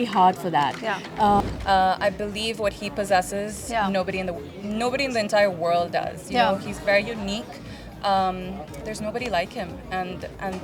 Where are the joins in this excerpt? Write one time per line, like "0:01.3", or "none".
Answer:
0:01.4

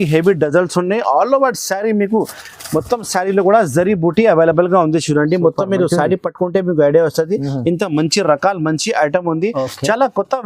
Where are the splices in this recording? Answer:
none

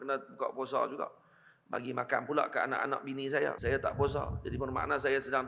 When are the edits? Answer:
0:03.6

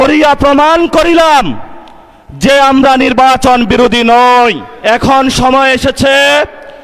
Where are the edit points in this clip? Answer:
0:04.7

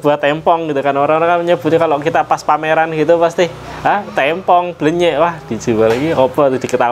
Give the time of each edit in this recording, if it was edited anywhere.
none

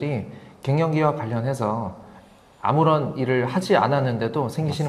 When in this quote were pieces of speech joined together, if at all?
none

